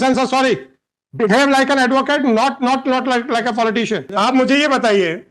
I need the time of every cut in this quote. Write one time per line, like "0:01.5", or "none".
0:04.1